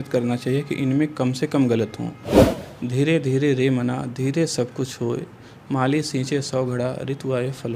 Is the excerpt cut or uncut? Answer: cut